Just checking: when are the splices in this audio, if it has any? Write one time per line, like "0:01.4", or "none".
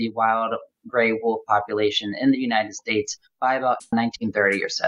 0:03.9